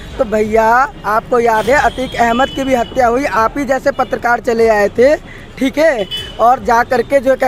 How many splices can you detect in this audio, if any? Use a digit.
0